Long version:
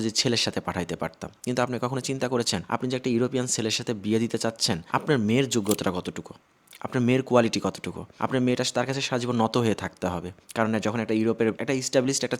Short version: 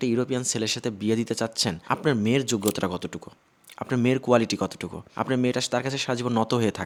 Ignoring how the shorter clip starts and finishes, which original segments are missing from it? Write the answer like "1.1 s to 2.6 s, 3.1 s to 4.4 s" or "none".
none